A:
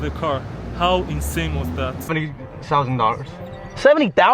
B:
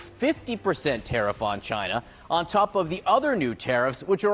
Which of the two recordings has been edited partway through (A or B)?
A